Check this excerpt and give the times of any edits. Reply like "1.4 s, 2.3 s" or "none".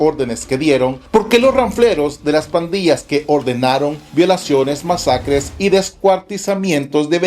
1.0 s